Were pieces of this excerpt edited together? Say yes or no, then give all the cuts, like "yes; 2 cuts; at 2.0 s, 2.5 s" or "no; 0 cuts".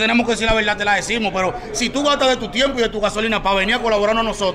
no; 0 cuts